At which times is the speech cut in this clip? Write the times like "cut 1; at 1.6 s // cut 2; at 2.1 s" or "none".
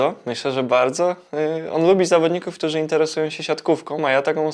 none